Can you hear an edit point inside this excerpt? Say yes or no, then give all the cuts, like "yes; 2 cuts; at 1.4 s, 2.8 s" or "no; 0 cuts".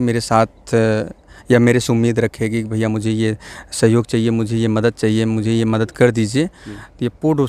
no; 0 cuts